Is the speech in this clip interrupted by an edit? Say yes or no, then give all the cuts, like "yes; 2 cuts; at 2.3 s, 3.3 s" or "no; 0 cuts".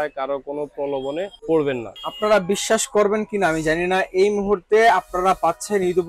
yes; 2 cuts; at 1.3 s, 2.0 s